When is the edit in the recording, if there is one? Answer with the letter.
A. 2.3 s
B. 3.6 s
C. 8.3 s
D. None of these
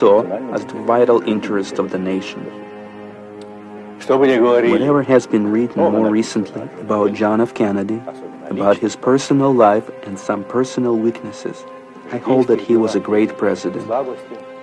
A